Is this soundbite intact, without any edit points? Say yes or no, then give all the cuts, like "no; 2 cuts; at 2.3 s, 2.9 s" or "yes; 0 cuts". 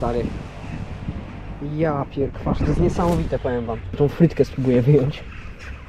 no; 1 cut; at 4.0 s